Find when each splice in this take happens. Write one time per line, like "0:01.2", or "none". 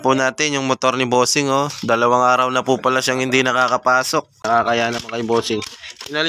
0:04.3